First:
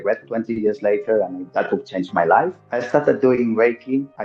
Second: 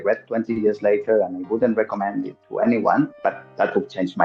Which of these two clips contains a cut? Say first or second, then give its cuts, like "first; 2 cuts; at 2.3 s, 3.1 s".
first; 2 cuts; at 1.4 s, 2.6 s